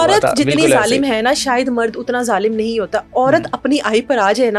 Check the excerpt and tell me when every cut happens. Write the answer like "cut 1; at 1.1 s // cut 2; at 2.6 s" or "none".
none